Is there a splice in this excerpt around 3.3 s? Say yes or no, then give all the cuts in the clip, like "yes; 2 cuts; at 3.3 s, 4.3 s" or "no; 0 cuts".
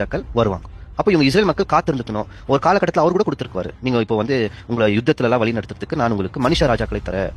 no; 1 cut; at 5.5 s